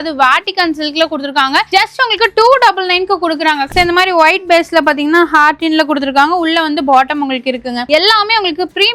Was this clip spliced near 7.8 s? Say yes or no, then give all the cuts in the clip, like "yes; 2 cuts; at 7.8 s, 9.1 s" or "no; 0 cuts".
yes; 2 cuts; at 3.7 s, 7.8 s